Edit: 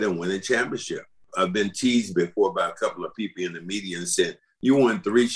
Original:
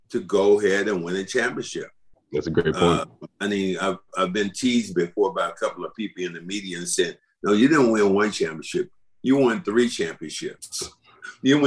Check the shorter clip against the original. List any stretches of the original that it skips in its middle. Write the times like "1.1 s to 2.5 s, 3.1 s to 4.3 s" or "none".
2.1 s to 4.1 s, 7.2 s to 9.1 s